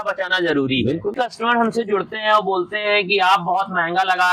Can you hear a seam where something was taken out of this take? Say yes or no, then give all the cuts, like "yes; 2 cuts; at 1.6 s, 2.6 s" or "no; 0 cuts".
yes; 1 cut; at 1.1 s